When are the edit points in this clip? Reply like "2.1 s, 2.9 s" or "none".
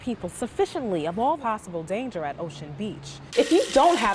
3.2 s